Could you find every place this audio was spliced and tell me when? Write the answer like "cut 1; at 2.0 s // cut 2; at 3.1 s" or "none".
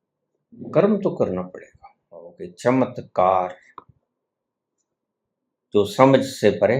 cut 1; at 2.4 s